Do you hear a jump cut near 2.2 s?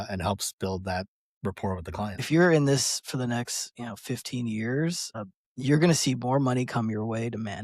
yes; 1 cut; at 2.2 s

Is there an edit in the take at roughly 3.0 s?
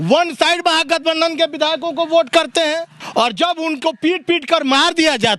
yes; 1 cut; at 3.0 s

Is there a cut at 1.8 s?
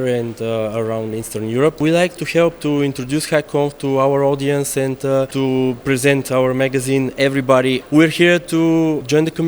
yes; 3 cuts; at 1.8 s, 5.3 s, 7.8 s

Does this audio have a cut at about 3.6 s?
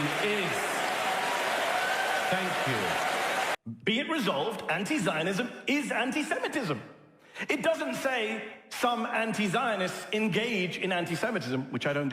yes; 1 cut; at 3.6 s

